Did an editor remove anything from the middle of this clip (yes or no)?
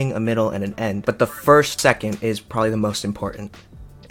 yes